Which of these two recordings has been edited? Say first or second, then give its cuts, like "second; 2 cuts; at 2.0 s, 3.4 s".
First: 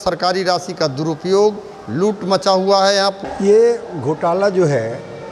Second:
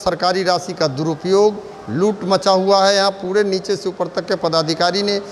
first; 1 cut; at 3.2 s